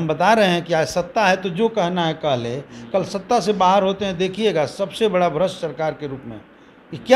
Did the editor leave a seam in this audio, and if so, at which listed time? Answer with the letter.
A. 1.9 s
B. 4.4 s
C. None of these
C